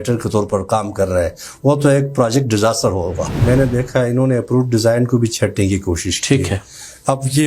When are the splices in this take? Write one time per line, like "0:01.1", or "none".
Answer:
0:03.4